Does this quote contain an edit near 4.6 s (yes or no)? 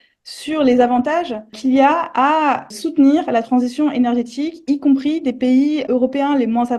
no